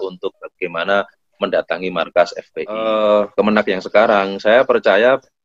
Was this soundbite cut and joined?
yes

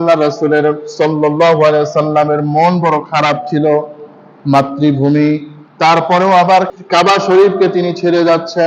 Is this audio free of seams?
no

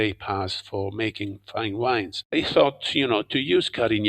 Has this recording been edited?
yes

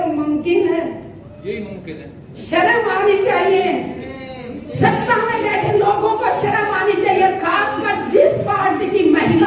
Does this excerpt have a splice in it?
no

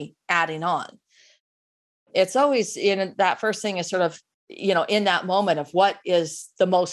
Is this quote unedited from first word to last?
no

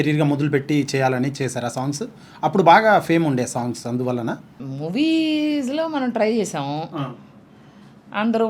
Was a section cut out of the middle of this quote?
no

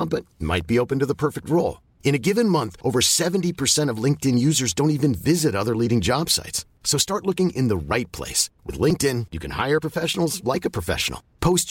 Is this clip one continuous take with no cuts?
yes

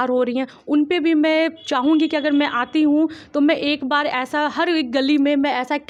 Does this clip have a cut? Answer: no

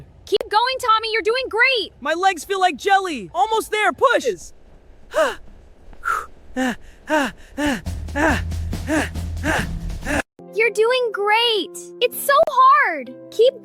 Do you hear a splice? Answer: yes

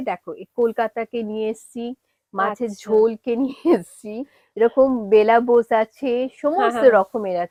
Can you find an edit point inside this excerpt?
no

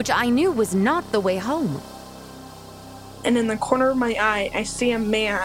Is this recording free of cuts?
no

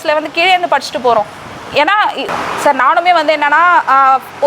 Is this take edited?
yes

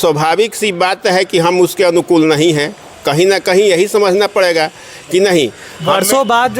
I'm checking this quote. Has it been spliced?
no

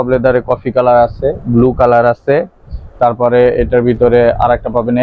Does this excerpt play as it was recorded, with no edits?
yes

